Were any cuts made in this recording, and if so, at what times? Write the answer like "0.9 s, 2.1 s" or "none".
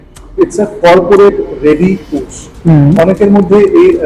2.5 s